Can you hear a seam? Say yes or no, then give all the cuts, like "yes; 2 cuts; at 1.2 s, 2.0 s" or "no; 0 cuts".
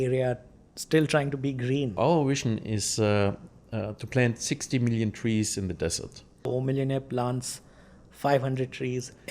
yes; 2 cuts; at 2.0 s, 6.5 s